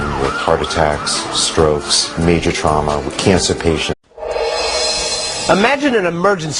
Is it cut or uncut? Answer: uncut